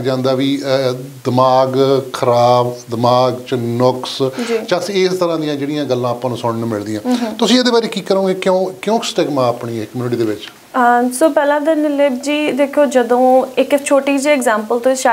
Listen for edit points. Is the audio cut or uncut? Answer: uncut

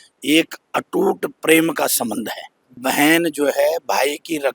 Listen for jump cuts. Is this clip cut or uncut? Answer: cut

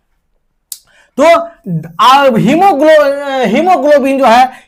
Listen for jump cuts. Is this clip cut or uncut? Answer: uncut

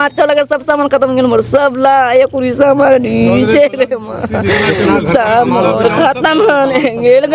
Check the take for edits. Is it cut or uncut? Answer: uncut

